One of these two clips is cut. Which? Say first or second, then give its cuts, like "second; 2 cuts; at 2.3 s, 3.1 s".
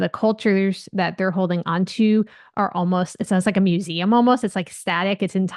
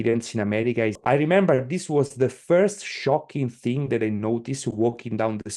second; 1 cut; at 1.0 s